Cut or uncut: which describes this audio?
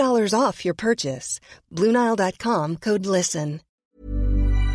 cut